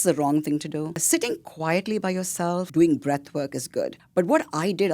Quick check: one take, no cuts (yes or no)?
no